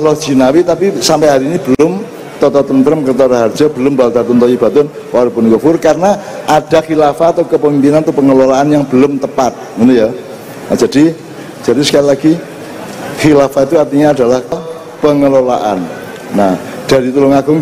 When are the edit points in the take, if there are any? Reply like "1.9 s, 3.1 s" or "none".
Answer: 14.6 s